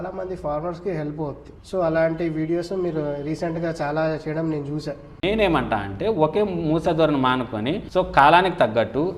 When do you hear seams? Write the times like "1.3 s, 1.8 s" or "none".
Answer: 1.5 s, 5.2 s, 7.8 s